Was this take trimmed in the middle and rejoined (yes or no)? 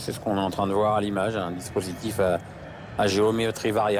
no